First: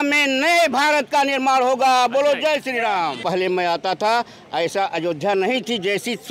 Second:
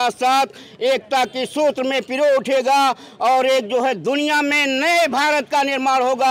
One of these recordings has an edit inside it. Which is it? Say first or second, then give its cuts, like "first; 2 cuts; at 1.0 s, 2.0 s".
first; 1 cut; at 3.2 s